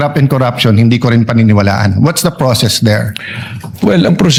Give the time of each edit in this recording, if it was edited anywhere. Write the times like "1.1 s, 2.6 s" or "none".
none